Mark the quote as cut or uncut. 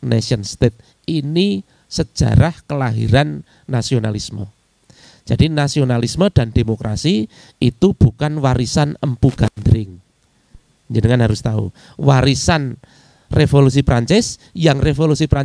uncut